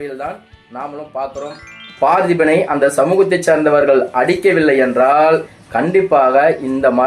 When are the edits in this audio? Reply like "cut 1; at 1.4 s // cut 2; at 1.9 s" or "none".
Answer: cut 1; at 1.9 s